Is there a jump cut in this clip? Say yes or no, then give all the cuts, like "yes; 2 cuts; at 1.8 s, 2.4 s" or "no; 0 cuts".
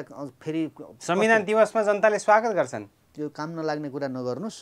yes; 1 cut; at 3.0 s